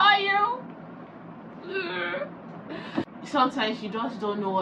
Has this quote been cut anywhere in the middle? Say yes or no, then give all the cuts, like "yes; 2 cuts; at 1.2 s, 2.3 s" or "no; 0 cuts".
yes; 1 cut; at 3.2 s